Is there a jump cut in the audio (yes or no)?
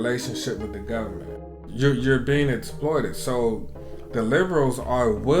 yes